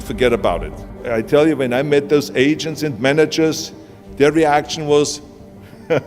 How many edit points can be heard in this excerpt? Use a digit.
1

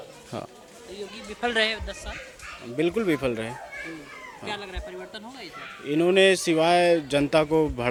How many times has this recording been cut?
0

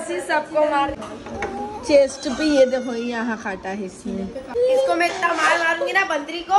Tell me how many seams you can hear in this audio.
2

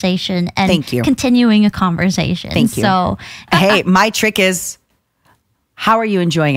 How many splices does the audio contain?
1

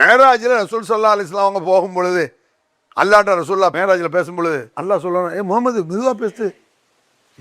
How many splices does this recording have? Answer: 2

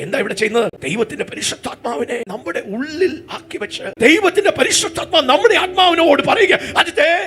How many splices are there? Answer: 2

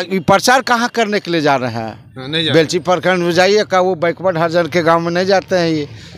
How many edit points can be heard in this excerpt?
0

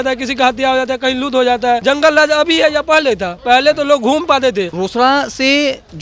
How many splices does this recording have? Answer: 2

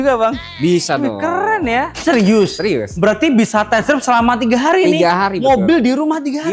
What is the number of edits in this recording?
1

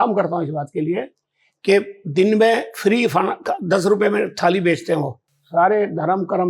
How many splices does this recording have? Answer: 1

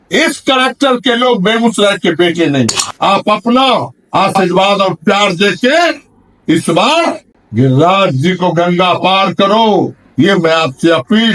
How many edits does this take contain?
1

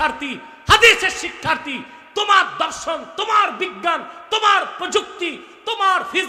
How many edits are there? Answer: 0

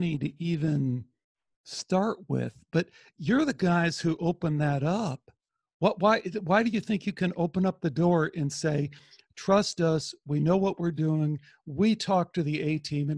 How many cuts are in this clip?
0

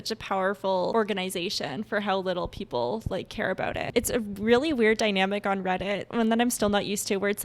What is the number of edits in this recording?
2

